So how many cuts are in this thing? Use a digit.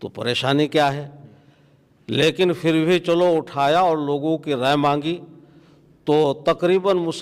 0